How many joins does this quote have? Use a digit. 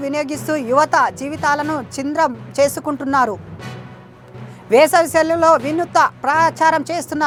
0